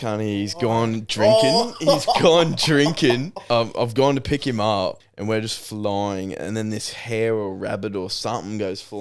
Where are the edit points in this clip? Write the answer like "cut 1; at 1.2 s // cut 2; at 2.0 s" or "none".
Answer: cut 1; at 3.3 s // cut 2; at 5.1 s